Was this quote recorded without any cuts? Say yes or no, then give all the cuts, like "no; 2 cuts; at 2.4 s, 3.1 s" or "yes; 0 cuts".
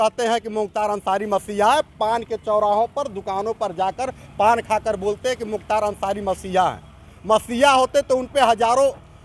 yes; 0 cuts